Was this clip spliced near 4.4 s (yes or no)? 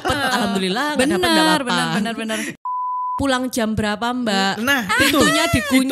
no